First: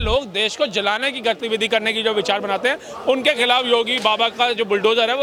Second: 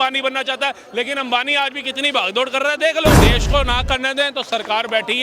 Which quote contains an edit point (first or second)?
second